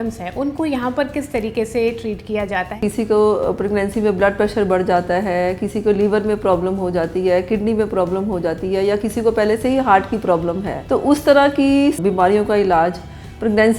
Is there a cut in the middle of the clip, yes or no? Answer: yes